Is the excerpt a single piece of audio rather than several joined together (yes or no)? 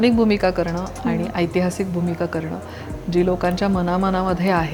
yes